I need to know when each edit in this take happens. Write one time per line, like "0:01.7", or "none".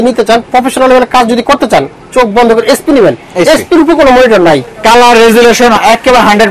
none

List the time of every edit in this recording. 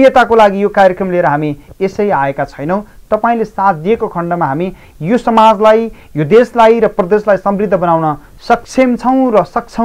none

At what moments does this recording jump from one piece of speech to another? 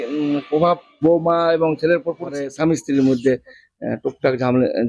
0:00.9
0:02.5

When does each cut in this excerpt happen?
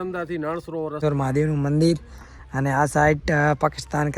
0:01.0

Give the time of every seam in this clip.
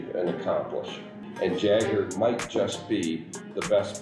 0:01.2

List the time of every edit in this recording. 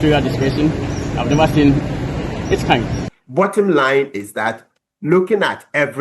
0:03.0

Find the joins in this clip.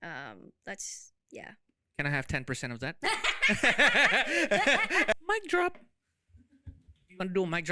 0:05.1

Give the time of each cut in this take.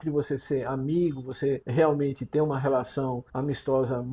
0:01.6
0:03.3

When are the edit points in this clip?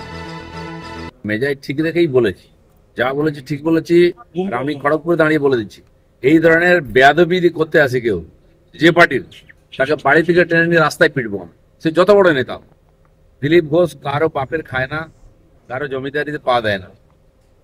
0:01.1

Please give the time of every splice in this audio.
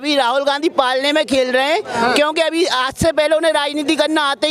none

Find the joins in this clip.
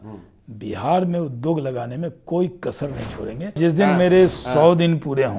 0:03.6

